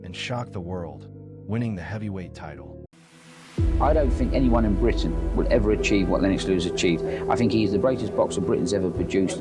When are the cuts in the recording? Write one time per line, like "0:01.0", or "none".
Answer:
0:02.9